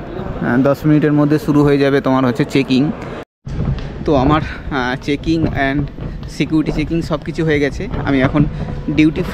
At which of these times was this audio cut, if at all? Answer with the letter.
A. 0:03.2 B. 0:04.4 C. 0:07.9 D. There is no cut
A